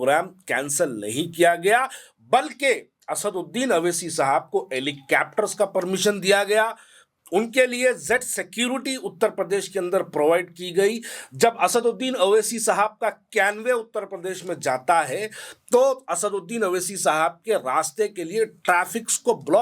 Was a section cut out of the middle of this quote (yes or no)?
no